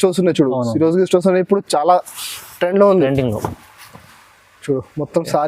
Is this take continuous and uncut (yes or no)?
yes